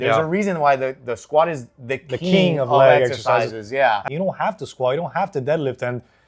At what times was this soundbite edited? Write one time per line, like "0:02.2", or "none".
0:04.0